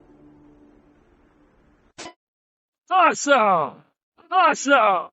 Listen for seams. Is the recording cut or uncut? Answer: cut